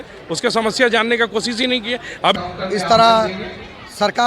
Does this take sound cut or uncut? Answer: cut